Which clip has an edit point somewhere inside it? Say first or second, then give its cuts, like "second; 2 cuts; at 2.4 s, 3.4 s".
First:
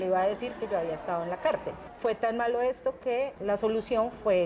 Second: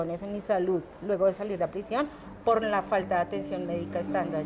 first; 2 cuts; at 1.8 s, 3.4 s